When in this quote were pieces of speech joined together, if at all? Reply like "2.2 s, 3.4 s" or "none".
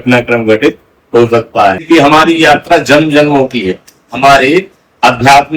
1.8 s